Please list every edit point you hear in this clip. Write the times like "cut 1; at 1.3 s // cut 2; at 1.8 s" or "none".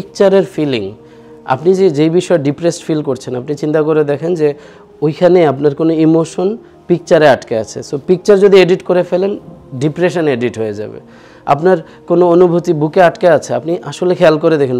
none